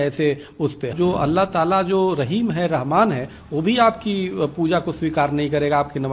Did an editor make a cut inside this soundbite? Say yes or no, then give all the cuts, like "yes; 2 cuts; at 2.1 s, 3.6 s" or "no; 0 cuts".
yes; 1 cut; at 0.9 s